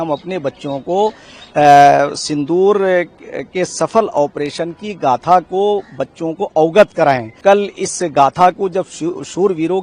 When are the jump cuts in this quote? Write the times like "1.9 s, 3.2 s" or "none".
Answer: 7.4 s